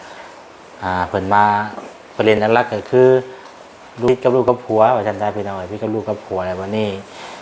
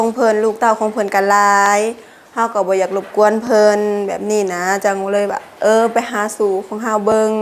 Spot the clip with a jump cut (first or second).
first